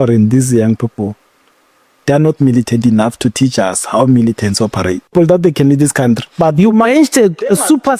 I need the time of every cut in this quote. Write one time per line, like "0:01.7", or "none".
0:05.1